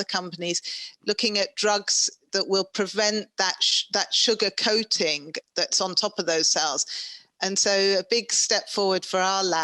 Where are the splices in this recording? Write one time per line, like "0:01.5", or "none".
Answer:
none